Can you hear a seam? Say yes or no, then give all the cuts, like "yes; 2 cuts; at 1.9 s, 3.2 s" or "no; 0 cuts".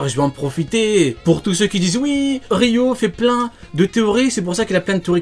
yes; 2 cuts; at 1.2 s, 2.4 s